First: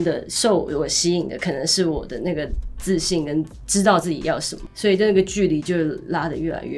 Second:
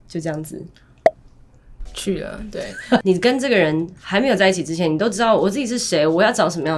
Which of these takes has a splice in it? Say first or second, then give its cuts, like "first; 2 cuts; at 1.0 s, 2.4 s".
second; 1 cut; at 3.0 s